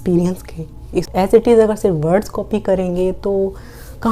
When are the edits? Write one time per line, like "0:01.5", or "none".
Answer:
0:01.2